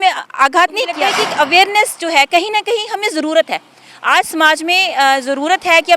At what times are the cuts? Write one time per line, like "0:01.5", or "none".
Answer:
0:00.9